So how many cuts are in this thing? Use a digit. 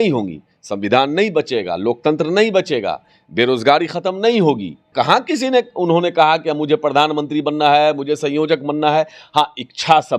1